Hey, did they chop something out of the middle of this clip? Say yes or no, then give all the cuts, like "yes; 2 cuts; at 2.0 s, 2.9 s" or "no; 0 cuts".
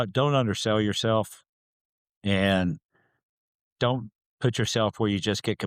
no; 0 cuts